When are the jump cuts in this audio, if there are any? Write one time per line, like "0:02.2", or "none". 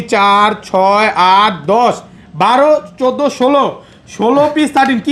none